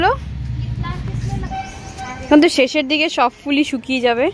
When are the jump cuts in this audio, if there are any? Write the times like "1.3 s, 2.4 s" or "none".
1.4 s

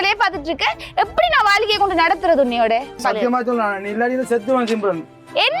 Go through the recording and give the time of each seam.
3.0 s

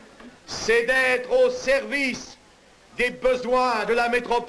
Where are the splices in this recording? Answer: 1.6 s

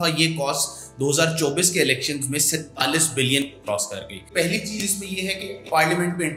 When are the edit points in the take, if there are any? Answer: 4.2 s

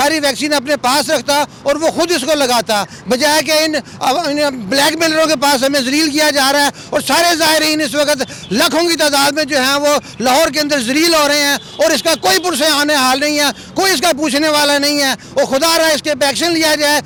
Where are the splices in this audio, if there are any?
none

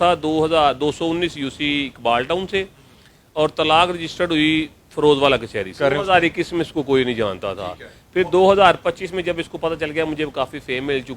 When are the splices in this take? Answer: 5.7 s

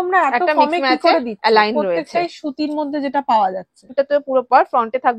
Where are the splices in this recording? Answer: 3.8 s

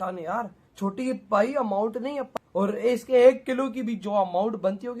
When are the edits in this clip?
2.2 s

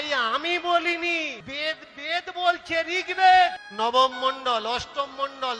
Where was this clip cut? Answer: 1.4 s, 3.6 s

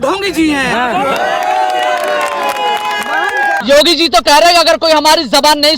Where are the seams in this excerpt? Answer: 3.6 s

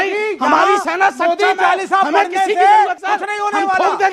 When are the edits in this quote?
3.0 s

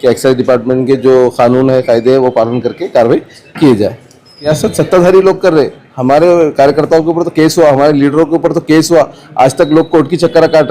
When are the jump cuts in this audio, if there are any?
4.5 s

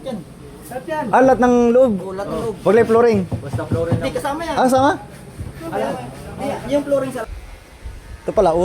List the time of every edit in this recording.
7.3 s

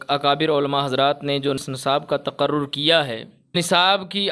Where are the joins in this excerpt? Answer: 1.6 s, 3.5 s

